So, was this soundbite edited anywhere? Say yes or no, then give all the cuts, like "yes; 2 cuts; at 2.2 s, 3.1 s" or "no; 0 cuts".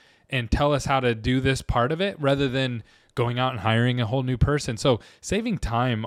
no; 0 cuts